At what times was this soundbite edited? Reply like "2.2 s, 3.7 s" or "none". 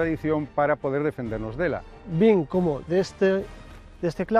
1.8 s